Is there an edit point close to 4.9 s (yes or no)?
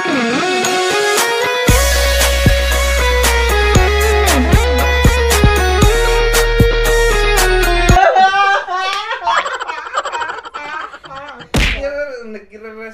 no